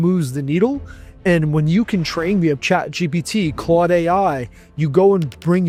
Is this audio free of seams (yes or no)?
yes